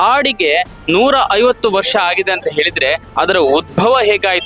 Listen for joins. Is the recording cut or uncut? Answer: uncut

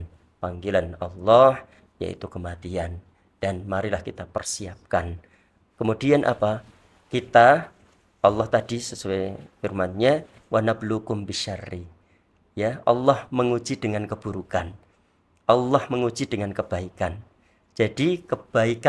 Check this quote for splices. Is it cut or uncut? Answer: uncut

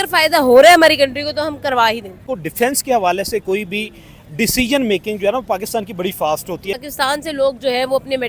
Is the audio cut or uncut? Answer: cut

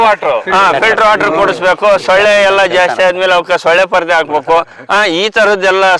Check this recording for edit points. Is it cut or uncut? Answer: cut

